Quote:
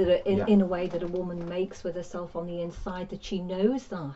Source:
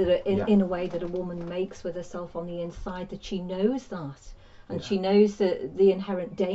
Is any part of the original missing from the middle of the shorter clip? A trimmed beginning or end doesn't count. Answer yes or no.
no